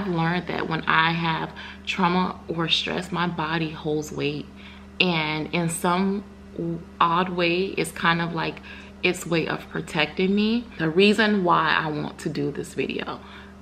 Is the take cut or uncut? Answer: cut